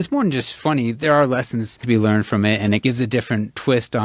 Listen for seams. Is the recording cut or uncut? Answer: cut